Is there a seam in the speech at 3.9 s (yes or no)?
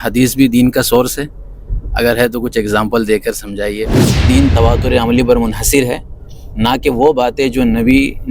yes